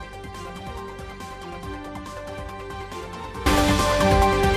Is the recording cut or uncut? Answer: cut